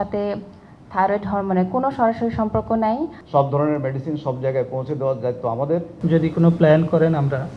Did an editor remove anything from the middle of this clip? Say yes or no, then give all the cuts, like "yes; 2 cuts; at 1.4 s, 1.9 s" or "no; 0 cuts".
yes; 2 cuts; at 3.2 s, 5.9 s